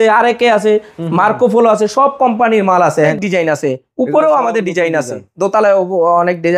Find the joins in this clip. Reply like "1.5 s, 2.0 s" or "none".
3.1 s